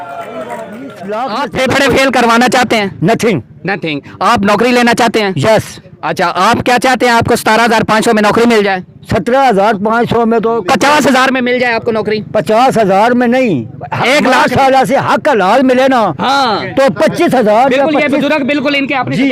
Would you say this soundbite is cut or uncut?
cut